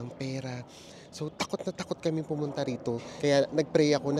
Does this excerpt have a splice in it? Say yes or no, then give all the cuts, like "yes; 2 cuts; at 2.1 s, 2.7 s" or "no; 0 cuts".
yes; 1 cut; at 3.1 s